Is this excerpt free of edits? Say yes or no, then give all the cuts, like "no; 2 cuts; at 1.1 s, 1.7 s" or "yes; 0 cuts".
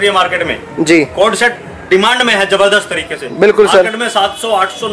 yes; 0 cuts